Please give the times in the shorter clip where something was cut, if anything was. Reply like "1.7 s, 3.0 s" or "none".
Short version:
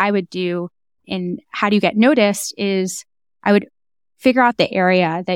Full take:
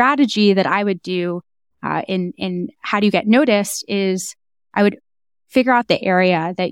1.0 s